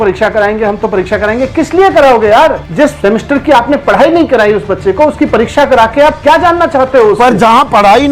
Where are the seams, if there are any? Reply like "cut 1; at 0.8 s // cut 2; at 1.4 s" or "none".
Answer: cut 1; at 2.7 s